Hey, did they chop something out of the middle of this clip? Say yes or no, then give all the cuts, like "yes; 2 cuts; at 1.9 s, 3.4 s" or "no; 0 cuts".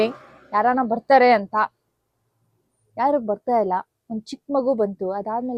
no; 0 cuts